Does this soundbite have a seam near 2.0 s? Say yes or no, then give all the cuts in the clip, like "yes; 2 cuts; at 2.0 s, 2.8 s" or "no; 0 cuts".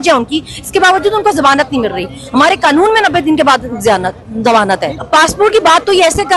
no; 1 cut; at 4.9 s